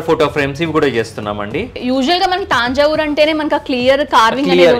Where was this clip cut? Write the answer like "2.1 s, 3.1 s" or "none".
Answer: 1.7 s